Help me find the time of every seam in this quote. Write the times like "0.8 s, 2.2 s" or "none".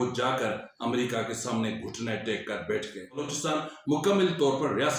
3.3 s